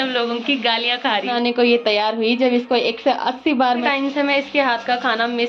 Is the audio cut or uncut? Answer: cut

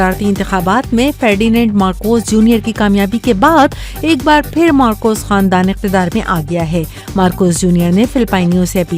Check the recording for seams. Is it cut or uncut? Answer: uncut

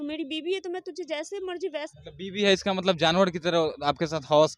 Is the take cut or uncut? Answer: cut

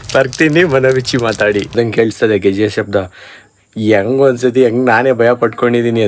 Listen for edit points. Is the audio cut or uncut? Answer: cut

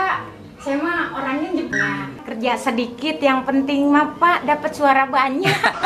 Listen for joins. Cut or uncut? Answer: cut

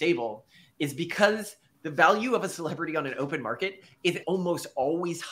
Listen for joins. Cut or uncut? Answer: cut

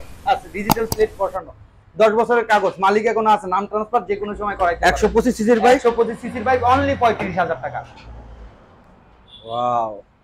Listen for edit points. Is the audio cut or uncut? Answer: uncut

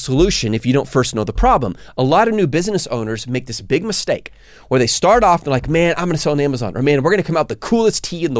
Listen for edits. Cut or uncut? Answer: uncut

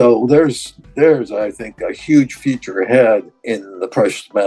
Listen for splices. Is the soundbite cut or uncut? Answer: uncut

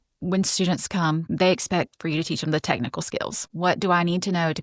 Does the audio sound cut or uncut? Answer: cut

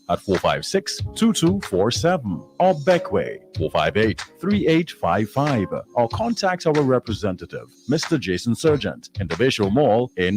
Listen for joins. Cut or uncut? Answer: uncut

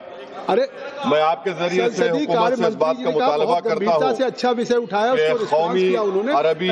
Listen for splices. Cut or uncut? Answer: cut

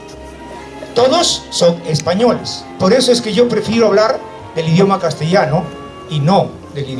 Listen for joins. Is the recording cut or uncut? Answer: cut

